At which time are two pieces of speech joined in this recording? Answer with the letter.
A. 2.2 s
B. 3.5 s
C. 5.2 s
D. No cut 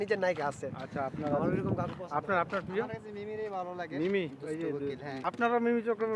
C